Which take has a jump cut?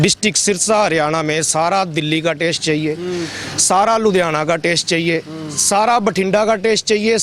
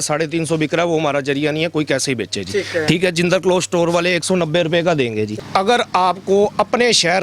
second; 1 cut; at 5.4 s

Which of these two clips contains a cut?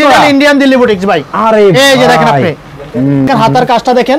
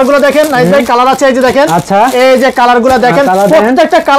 first; 1 cut; at 3.3 s

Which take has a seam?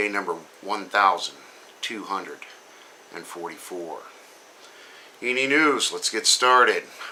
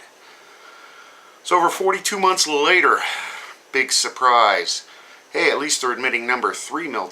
second; 1 cut; at 2.9 s

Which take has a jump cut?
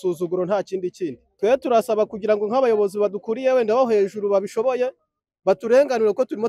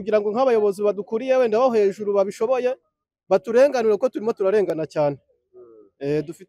first; 1 cut; at 1.2 s

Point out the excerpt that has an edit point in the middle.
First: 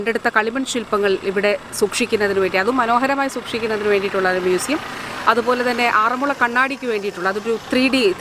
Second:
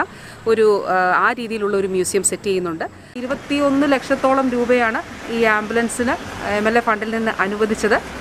second; 1 cut; at 3.2 s

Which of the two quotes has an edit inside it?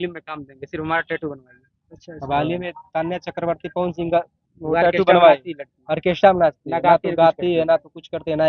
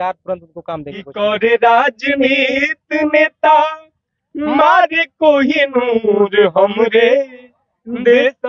second; 1 cut; at 1.1 s

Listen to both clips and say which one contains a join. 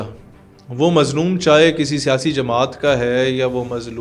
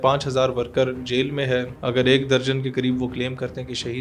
second; 1 cut; at 1.7 s

